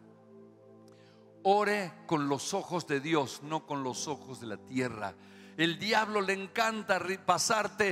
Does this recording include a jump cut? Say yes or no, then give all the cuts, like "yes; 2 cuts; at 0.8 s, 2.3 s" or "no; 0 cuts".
no; 0 cuts